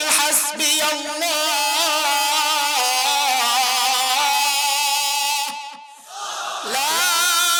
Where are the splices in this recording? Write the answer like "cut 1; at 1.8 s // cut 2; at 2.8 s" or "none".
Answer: none